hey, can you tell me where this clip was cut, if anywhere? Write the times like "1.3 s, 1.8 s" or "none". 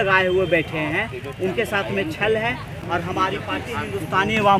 none